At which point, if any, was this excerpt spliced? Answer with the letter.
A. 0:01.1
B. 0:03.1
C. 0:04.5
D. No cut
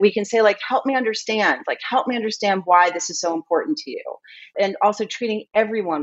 C